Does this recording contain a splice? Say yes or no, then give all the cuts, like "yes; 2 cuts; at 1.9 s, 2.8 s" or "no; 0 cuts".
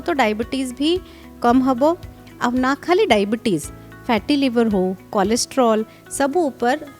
no; 0 cuts